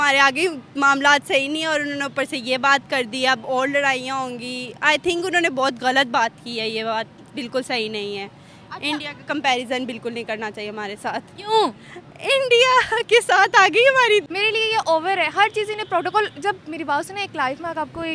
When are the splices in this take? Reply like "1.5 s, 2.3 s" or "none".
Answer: 14.2 s